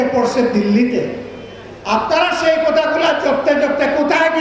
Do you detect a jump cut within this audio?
no; 0 cuts

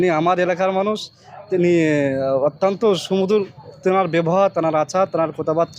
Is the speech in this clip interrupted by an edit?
no; 0 cuts

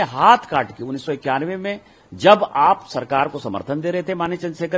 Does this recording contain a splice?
no; 0 cuts

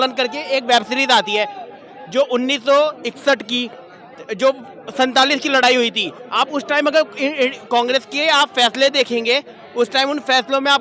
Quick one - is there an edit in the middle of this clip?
no; 0 cuts

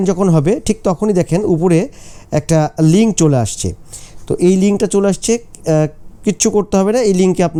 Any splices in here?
no; 0 cuts

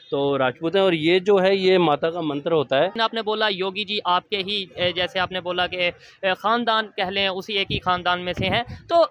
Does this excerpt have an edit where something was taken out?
yes; 1 cut; at 3.0 s

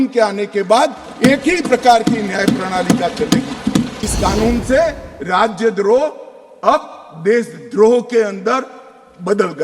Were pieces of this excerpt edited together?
yes; 1 cut; at 4.0 s

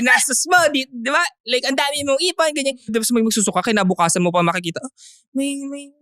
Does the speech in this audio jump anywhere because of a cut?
yes; 1 cut; at 2.6 s

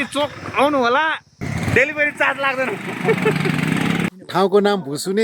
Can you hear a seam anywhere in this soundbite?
yes; 1 cut; at 4.1 s

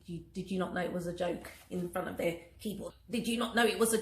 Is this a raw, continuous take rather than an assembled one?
no; 1 cut; at 2.9 s

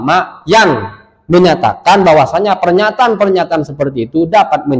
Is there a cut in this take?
no; 0 cuts

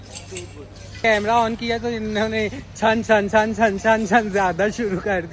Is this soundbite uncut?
no; 1 cut; at 1.0 s

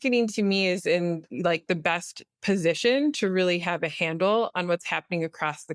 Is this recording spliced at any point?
no; 0 cuts

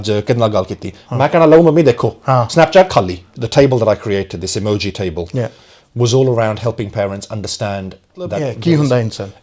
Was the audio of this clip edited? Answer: yes; 2 cuts; at 3.5 s, 8.4 s

